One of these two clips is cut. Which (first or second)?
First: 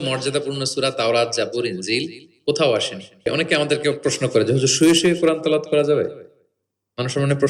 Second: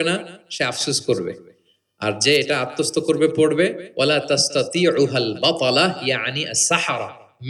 first